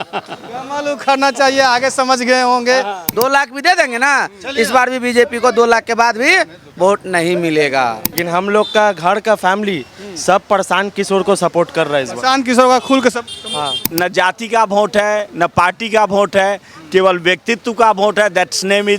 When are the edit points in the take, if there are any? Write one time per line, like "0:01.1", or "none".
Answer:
0:03.0
0:08.1
0:13.8